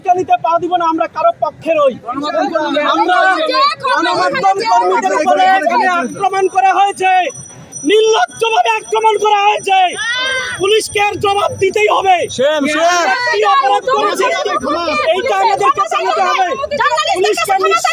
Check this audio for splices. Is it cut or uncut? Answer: uncut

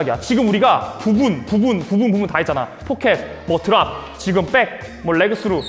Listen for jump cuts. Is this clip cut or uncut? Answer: uncut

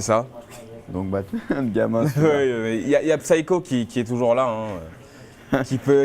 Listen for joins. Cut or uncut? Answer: cut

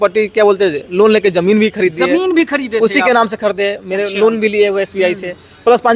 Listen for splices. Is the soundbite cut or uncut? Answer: uncut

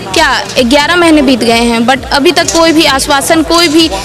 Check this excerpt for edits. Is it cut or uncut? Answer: uncut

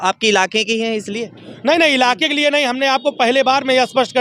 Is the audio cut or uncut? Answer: uncut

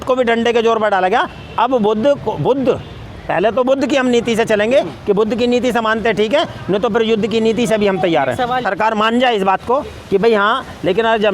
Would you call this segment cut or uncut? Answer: cut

